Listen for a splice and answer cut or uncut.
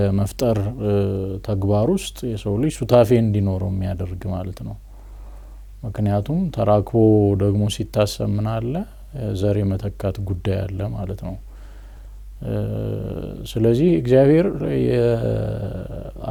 uncut